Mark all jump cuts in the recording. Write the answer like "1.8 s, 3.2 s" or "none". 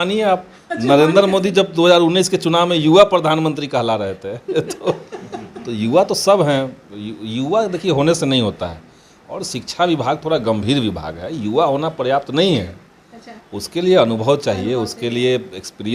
none